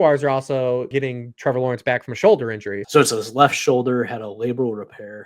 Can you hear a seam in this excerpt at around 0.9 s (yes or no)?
yes